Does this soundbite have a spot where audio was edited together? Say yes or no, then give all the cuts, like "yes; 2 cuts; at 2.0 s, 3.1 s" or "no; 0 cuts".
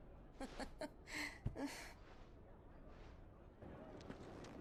no; 0 cuts